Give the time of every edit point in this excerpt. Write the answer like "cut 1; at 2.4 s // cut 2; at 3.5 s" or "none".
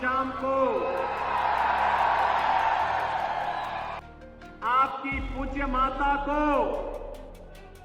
cut 1; at 4.0 s